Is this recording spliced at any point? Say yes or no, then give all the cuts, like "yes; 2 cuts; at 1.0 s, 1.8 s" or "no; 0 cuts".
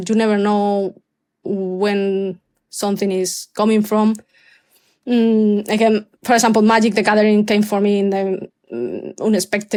no; 0 cuts